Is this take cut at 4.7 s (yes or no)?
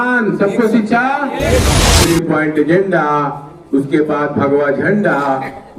no